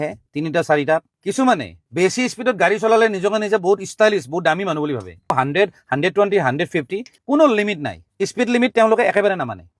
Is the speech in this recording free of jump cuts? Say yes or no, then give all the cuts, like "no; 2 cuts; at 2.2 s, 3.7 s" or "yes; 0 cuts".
no; 1 cut; at 1.1 s